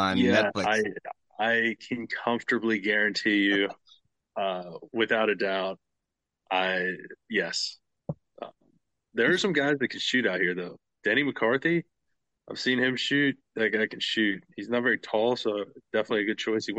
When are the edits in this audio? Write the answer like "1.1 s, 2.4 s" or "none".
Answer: none